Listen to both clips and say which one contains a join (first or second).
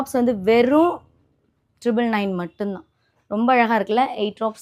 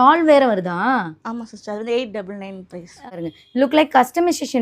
second